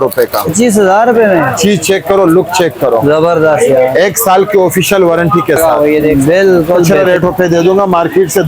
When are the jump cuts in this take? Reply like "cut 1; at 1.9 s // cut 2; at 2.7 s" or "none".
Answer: cut 1; at 6.9 s